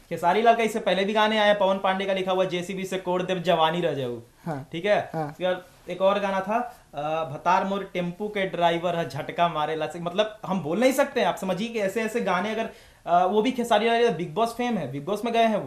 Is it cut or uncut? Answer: uncut